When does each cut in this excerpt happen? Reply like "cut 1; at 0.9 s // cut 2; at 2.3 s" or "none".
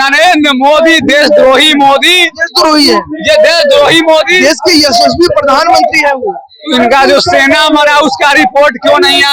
none